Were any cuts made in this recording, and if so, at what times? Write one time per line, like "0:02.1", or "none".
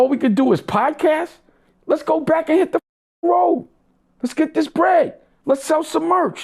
none